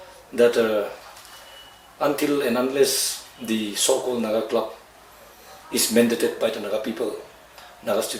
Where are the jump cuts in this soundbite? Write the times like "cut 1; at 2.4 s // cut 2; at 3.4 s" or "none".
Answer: none

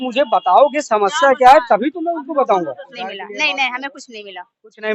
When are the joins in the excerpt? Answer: cut 1; at 2.9 s

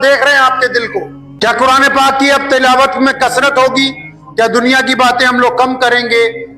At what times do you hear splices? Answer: cut 1; at 1.2 s

